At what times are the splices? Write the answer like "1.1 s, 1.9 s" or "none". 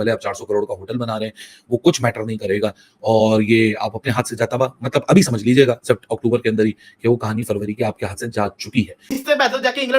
9.0 s